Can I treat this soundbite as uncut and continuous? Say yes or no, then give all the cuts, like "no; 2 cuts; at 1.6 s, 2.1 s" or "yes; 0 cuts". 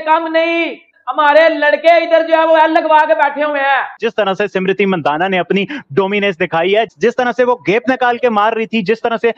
no; 1 cut; at 3.9 s